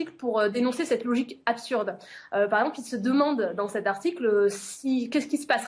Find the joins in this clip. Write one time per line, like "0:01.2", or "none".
0:02.7